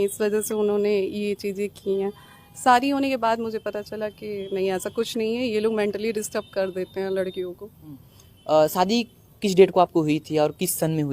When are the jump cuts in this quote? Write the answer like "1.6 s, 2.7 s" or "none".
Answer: none